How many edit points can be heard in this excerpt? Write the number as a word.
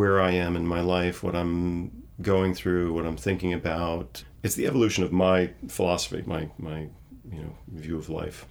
two